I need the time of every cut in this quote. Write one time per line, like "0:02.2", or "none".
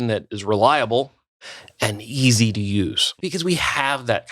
0:03.1